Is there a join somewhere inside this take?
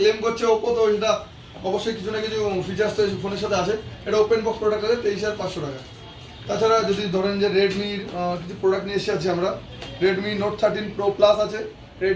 no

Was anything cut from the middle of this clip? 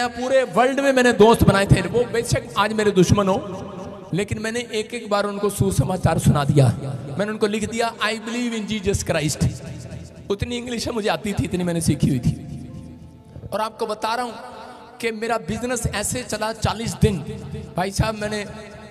no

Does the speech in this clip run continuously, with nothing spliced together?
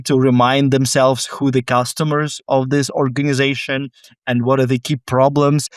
yes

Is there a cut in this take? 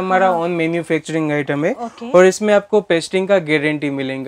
no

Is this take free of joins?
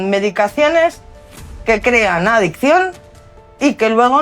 yes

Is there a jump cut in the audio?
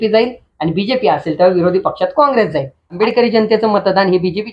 yes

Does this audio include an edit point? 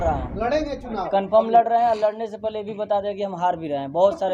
no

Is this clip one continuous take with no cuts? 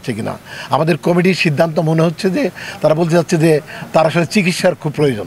yes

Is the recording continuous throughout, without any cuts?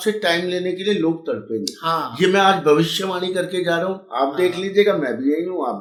yes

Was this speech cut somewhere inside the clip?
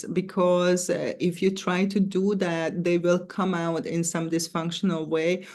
no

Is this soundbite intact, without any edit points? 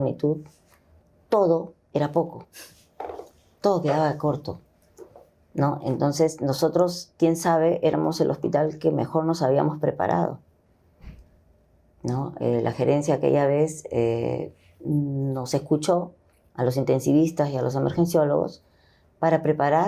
yes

